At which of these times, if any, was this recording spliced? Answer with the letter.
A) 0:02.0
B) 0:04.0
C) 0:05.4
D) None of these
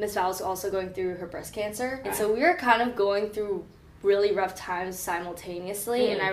A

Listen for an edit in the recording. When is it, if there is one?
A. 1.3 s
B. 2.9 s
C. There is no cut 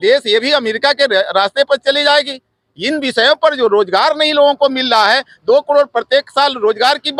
C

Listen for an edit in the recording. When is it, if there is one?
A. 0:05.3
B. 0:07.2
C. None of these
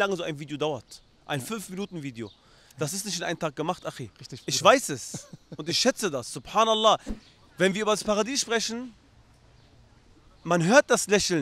B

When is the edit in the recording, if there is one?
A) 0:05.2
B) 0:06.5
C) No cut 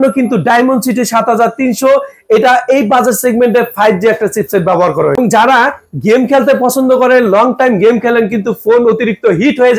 A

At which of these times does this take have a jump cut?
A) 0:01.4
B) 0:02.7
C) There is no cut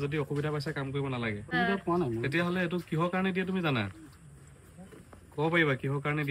A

